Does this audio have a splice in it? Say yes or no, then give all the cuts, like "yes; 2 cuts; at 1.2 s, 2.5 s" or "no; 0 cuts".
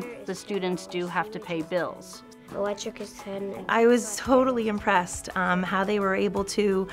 yes; 2 cuts; at 2.1 s, 3.6 s